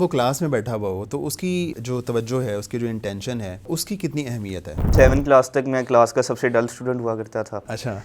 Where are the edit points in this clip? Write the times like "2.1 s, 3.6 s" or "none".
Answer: 1.7 s, 3.7 s, 4.9 s